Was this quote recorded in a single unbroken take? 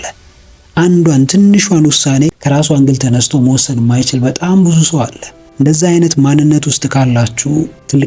yes; 0 cuts

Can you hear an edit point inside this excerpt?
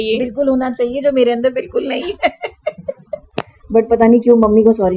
yes; 1 cut; at 3.3 s

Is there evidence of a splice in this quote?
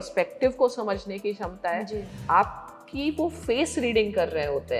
yes; 1 cut; at 2.1 s

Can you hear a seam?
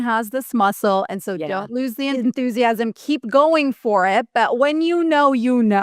yes; 1 cut; at 2.1 s

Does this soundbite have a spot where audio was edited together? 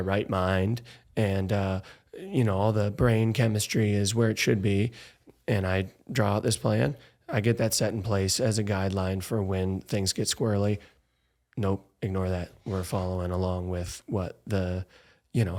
no; 0 cuts

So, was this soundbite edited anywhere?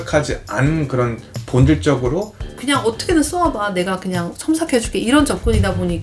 yes; 1 cut; at 2.5 s

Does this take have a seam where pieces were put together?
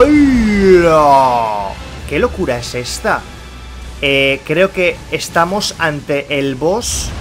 yes; 1 cut; at 1.9 s

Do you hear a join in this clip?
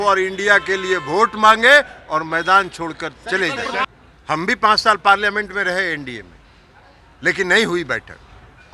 yes; 1 cut; at 3.9 s

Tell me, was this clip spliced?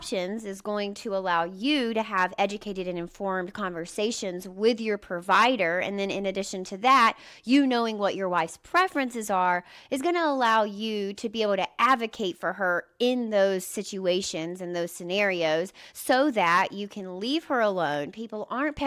no; 0 cuts

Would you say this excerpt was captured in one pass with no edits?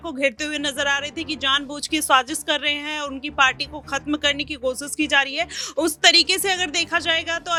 yes; 0 cuts

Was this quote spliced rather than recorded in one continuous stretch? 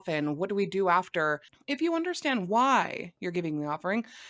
yes; 1 cut; at 1.5 s

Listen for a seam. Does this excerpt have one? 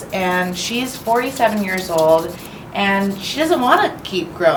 no; 0 cuts

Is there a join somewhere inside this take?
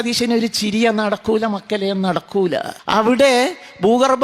yes; 1 cut; at 2.7 s

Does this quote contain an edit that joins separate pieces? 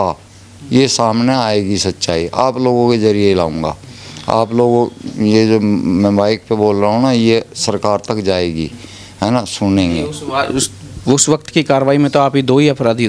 no; 0 cuts

